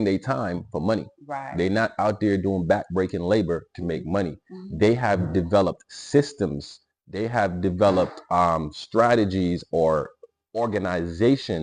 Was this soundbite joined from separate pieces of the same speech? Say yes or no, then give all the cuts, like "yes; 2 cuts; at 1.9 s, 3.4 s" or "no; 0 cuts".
no; 0 cuts